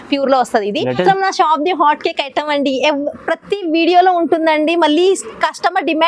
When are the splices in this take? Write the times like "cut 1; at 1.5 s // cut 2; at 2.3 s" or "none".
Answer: cut 1; at 1.0 s